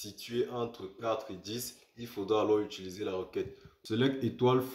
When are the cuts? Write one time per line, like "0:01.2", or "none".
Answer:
0:03.3